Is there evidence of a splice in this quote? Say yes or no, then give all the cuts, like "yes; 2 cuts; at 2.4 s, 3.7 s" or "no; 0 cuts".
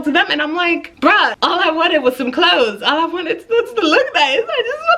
yes; 1 cut; at 1.3 s